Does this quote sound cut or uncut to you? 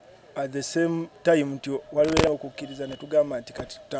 cut